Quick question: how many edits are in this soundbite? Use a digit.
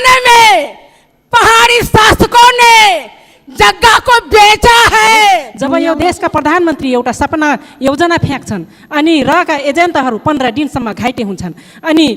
1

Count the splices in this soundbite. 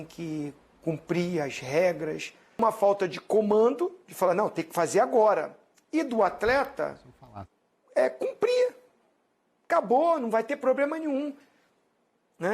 1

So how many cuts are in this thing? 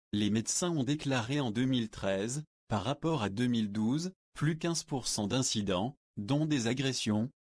1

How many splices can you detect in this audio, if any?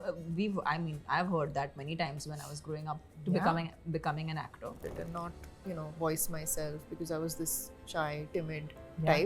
1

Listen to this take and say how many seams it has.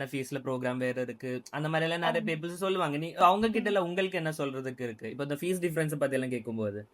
1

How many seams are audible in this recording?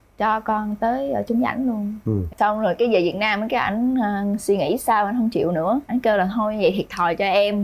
1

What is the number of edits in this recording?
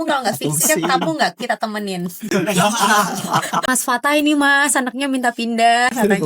1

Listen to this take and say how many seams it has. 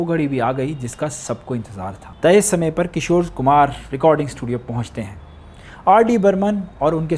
1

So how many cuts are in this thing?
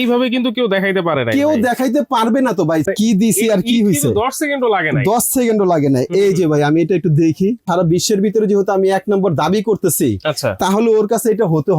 2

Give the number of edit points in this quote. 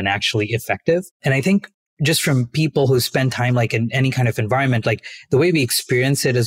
1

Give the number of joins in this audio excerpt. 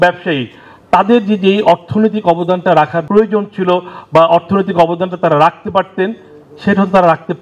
1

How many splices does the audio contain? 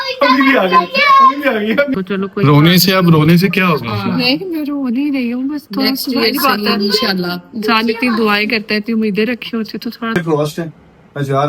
2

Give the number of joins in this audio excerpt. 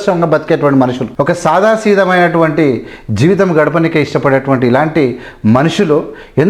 1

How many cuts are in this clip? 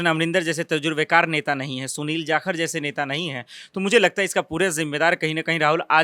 0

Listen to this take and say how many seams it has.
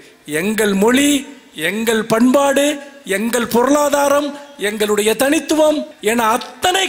1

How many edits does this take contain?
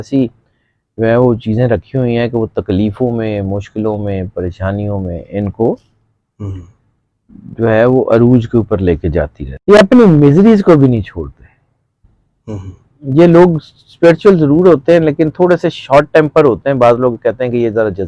1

